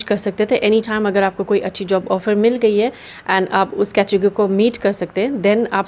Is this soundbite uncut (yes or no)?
yes